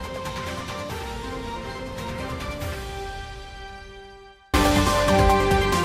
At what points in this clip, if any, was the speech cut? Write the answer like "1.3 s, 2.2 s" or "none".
4.5 s